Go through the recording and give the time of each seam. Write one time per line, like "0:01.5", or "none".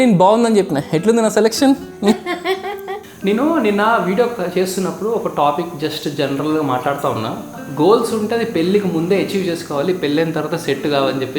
0:03.0
0:07.6